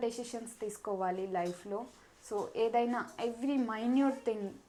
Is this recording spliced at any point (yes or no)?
no